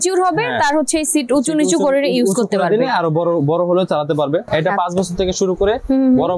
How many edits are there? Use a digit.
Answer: 1